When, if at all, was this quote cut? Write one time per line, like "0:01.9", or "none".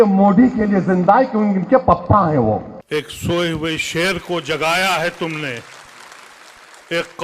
0:02.8